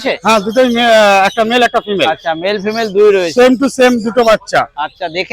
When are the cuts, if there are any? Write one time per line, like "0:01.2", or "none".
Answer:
none